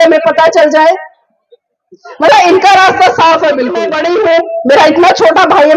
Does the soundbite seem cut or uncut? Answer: cut